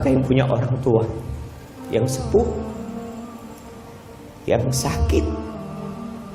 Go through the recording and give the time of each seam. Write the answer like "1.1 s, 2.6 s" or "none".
5.4 s